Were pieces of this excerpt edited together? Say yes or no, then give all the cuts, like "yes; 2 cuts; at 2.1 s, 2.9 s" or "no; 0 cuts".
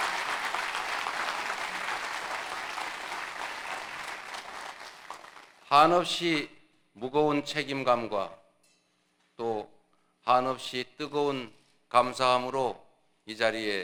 no; 0 cuts